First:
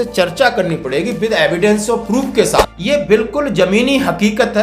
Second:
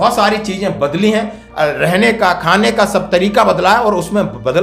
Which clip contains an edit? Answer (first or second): first